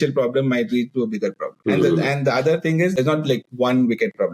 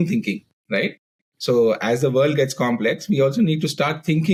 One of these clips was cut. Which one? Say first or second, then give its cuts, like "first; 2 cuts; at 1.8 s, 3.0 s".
first; 2 cuts; at 1.5 s, 3.0 s